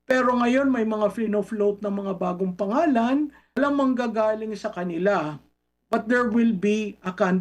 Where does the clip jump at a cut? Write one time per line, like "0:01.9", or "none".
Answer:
0:03.4